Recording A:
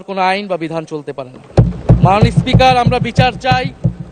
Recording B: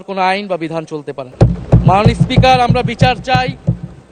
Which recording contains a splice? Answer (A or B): B